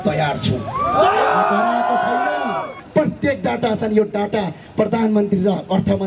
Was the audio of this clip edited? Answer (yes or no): yes